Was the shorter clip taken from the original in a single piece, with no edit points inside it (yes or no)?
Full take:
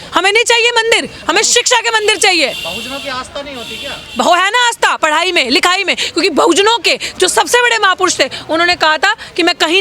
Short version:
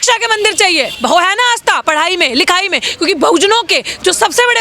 no